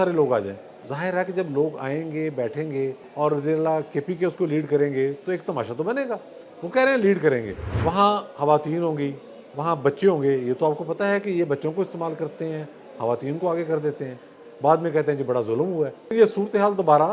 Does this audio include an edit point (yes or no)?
yes